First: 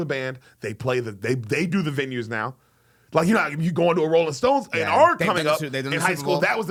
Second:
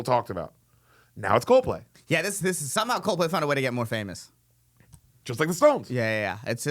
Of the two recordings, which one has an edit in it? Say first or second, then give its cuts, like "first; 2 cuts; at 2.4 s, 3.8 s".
second; 1 cut; at 1.9 s